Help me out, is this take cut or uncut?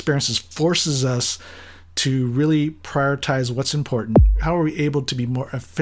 cut